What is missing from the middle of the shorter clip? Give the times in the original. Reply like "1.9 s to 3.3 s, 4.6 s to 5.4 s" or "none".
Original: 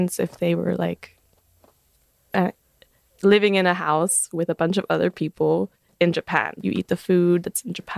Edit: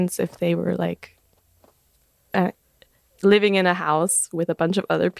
none